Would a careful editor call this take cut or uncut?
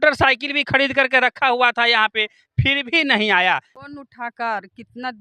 cut